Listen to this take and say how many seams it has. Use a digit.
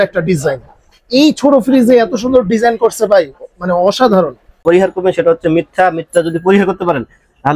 1